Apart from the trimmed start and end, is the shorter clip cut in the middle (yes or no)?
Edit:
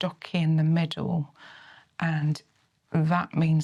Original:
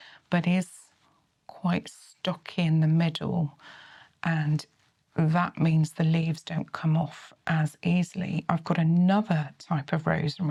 no